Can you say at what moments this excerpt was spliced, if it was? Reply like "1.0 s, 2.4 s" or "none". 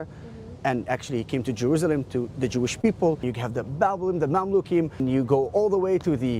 3.3 s, 5.0 s